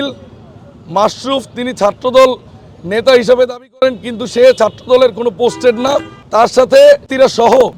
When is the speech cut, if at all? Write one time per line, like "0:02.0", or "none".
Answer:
none